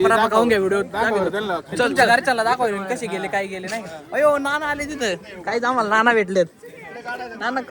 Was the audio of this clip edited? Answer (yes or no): no